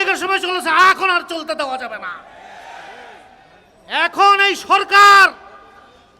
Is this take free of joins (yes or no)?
yes